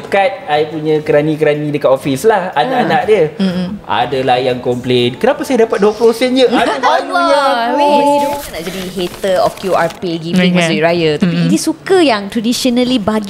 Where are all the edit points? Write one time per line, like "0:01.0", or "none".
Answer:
0:08.4